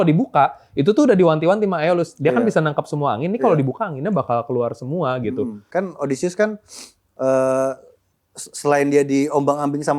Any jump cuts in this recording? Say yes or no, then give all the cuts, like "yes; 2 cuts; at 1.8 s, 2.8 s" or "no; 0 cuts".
yes; 1 cut; at 5.6 s